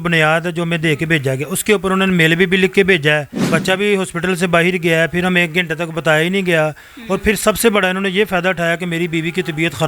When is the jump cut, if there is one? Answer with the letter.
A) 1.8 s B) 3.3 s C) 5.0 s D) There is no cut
B